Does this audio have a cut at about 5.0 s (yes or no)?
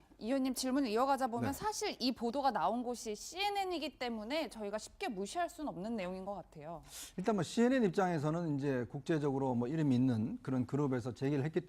no